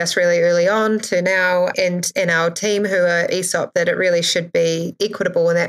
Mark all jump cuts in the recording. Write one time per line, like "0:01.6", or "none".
none